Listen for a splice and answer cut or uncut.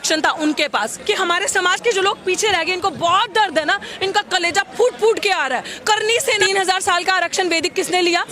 cut